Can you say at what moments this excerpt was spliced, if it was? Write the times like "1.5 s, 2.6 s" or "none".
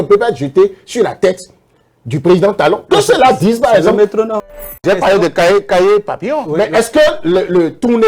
4.7 s